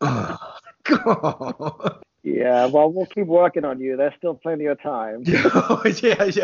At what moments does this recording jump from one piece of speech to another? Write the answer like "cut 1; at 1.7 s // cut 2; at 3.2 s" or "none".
cut 1; at 2.1 s